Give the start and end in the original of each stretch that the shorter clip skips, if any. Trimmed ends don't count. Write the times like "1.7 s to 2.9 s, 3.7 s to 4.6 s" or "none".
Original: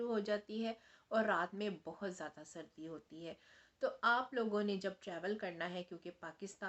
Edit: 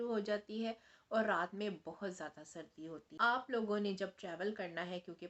3.1 s to 4.0 s